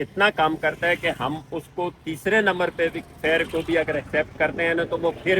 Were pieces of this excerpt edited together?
no; 0 cuts

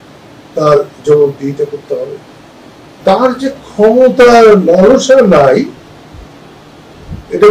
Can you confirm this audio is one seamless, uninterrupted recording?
no; 1 cut; at 3.0 s

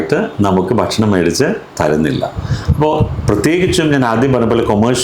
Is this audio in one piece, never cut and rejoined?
yes; 0 cuts

